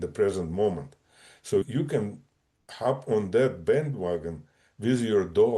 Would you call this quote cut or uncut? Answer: cut